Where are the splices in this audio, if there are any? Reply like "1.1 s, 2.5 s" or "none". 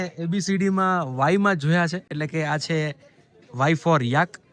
none